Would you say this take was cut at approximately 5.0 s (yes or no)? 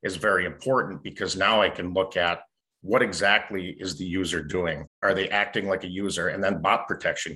yes